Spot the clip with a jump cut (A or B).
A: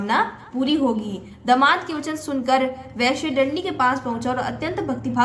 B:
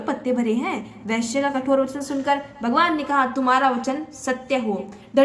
B